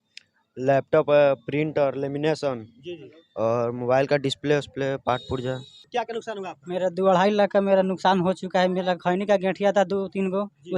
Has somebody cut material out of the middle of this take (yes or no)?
yes